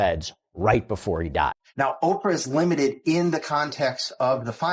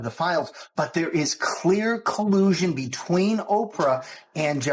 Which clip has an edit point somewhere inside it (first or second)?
first